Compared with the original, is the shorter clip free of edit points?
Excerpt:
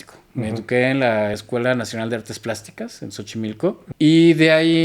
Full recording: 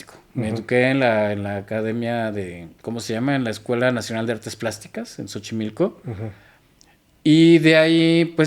no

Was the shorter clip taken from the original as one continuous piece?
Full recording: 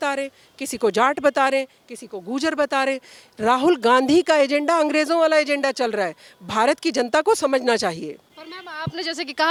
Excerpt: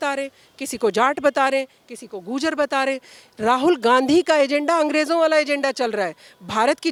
yes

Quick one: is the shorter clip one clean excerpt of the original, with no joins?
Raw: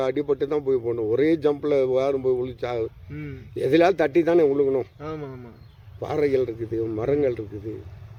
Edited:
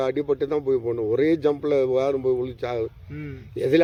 yes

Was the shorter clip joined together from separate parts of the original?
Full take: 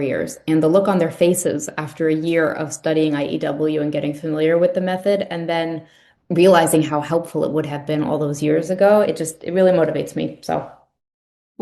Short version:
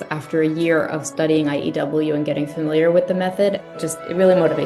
yes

